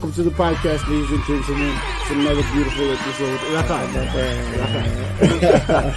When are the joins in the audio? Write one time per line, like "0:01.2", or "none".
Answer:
none